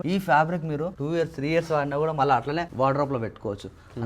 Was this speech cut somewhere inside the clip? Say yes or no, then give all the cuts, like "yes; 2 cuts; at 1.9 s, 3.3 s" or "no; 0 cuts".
yes; 1 cut; at 0.9 s